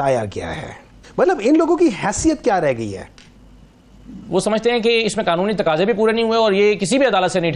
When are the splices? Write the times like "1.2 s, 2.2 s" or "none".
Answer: 1.0 s, 4.1 s